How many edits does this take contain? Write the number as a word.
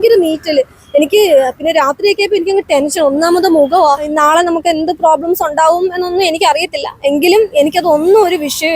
one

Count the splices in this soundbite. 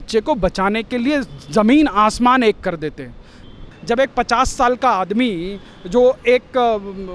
one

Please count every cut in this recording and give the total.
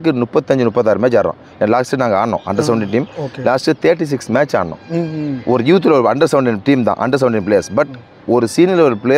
zero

